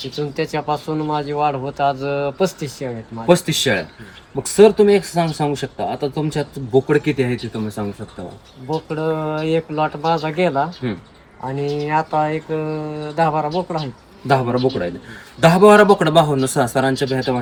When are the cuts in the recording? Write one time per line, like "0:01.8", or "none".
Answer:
none